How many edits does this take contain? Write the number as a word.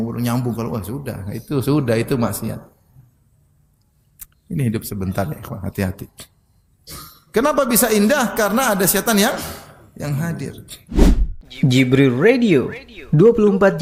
one